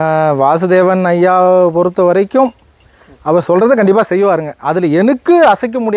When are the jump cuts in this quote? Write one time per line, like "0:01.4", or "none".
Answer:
none

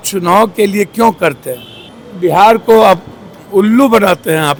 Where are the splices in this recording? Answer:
none

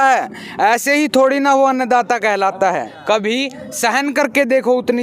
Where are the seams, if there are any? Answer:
0:02.9

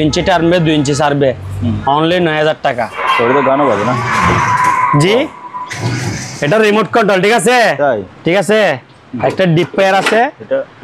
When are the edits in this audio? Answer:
0:03.0
0:08.1

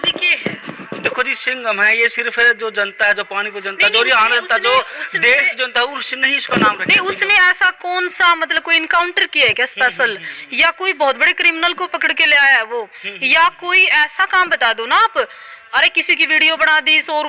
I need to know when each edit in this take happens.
none

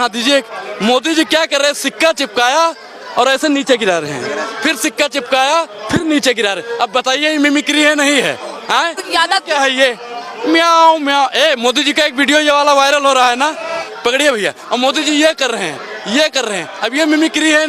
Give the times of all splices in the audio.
0:09.0
0:13.8

